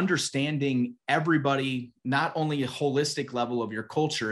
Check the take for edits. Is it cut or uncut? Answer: uncut